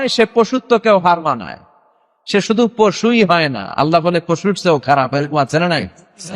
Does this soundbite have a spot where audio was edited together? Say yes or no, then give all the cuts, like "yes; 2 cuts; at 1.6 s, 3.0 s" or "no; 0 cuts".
no; 0 cuts